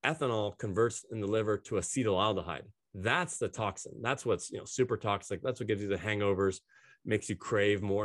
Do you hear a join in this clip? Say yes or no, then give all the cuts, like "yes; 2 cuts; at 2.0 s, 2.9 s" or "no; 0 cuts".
no; 0 cuts